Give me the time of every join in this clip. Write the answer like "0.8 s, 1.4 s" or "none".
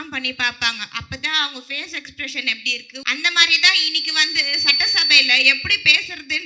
3.0 s